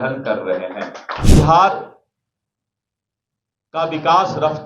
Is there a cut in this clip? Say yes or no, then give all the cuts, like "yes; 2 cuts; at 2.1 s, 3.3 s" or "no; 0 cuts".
yes; 1 cut; at 1.2 s